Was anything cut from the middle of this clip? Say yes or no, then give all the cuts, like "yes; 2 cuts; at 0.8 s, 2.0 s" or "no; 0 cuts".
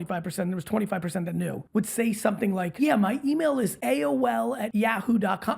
yes; 4 cuts; at 1.6 s, 2.7 s, 3.8 s, 4.7 s